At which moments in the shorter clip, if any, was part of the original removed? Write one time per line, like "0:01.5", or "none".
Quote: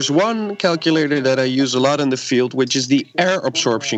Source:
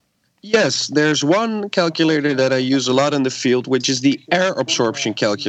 none